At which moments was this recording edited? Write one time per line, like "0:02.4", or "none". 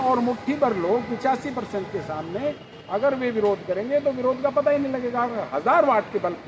none